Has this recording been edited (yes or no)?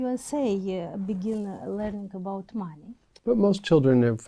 yes